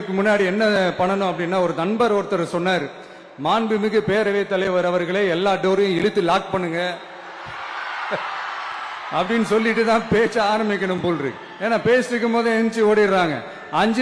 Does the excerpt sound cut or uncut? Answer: uncut